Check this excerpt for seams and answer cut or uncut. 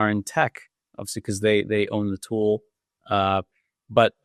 uncut